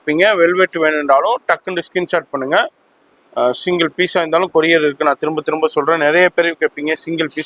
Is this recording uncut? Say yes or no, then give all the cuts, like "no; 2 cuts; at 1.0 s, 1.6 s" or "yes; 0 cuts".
yes; 0 cuts